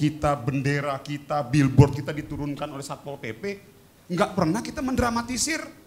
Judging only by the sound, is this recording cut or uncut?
uncut